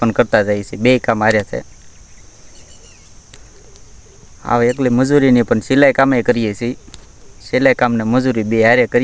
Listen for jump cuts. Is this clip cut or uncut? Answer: cut